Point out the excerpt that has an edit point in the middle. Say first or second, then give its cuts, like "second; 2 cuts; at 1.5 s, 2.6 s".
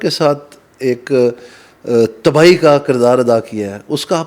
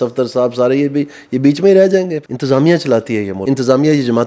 second; 2 cuts; at 2.2 s, 3.3 s